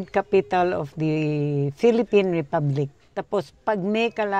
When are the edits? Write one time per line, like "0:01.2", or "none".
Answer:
0:03.0